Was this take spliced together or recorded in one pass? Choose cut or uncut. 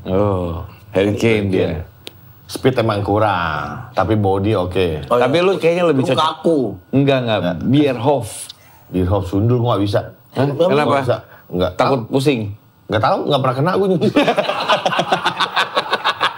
uncut